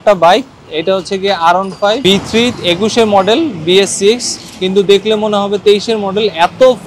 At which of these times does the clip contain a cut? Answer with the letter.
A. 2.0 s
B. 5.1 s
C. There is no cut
A